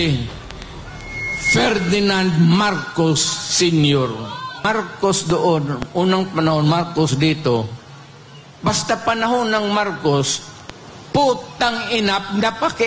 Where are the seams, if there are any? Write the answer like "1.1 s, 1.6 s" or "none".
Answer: 4.7 s